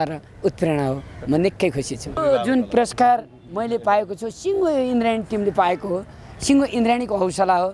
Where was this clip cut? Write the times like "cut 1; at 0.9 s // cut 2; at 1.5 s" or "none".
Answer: cut 1; at 2.2 s